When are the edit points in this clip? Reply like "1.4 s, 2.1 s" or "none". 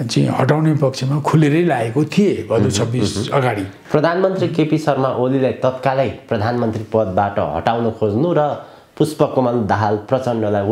3.8 s